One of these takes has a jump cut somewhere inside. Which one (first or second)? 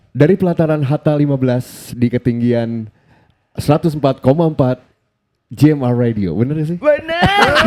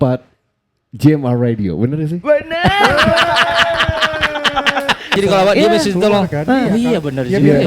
second